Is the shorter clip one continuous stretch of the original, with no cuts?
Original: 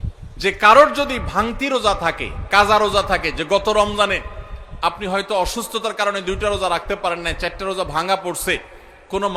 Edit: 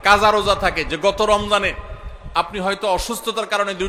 yes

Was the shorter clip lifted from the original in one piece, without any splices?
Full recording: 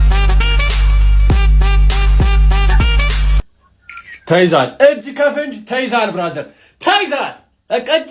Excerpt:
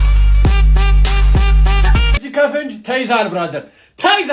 no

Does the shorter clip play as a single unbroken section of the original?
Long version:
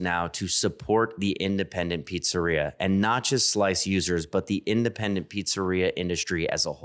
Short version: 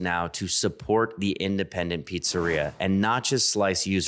yes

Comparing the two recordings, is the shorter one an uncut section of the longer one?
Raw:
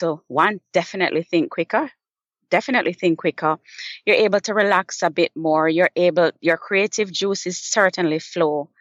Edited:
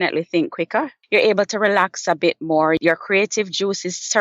no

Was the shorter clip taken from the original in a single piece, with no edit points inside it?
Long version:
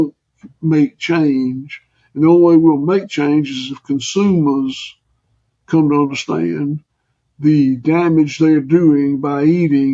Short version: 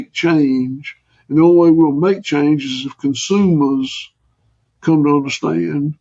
yes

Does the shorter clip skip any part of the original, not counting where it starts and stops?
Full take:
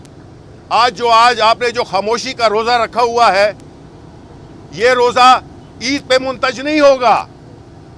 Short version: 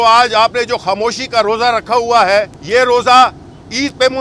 yes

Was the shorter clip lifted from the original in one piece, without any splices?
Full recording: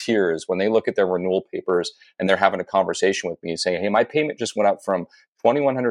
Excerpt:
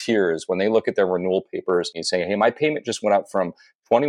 no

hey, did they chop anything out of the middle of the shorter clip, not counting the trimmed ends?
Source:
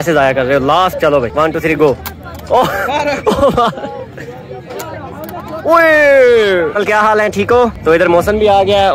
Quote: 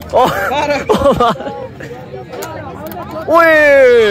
no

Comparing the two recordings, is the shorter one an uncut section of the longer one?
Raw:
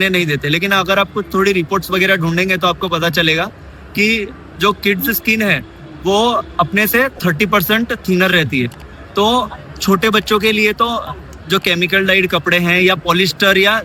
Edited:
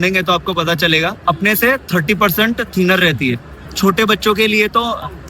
no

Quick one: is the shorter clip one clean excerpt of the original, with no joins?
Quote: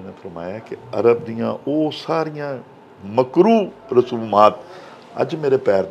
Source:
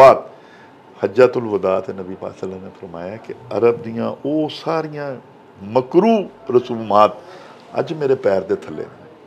yes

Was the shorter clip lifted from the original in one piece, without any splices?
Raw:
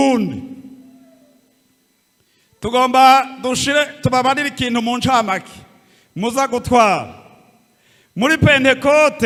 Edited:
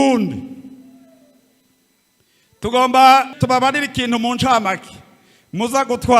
no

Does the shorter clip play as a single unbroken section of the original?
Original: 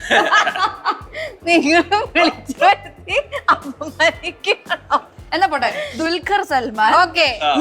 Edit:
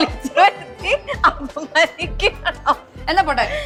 yes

